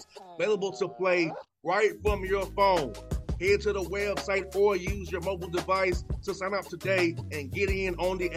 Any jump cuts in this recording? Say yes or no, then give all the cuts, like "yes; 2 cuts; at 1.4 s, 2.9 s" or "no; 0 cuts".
no; 0 cuts